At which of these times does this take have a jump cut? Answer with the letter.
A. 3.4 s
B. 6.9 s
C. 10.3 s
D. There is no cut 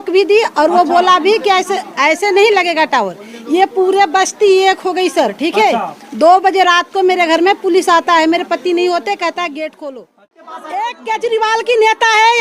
C